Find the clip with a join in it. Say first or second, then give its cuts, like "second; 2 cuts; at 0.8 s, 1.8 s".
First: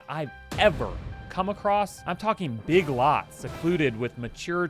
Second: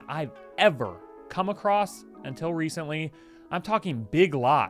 first; 1 cut; at 2.0 s